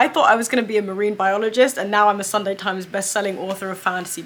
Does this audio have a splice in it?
no; 0 cuts

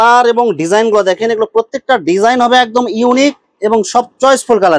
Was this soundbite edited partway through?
no; 0 cuts

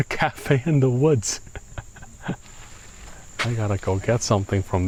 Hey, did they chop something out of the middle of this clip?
no; 0 cuts

